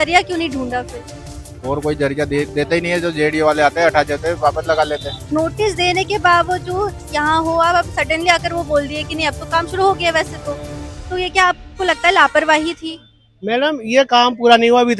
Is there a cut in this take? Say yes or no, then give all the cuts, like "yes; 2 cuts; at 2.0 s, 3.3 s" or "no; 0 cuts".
no; 0 cuts